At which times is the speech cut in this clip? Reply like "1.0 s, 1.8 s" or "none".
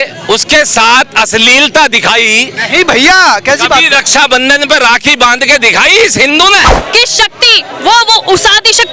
6.8 s